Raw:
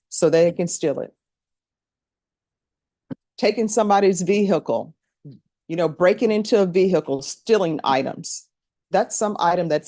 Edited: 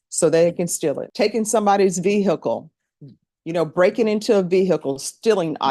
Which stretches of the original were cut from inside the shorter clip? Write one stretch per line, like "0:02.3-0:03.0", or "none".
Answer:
0:01.1-0:03.3